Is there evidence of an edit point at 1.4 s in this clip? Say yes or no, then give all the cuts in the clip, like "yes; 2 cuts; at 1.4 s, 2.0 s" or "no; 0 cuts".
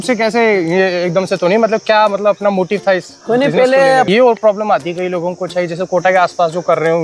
no; 1 cut; at 4.1 s